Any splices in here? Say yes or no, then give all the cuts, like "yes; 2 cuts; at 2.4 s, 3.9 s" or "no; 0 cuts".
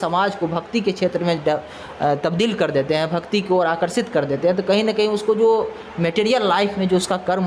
no; 0 cuts